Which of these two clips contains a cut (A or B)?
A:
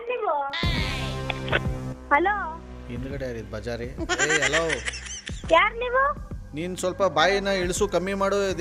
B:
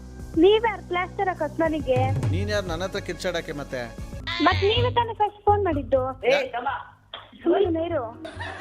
B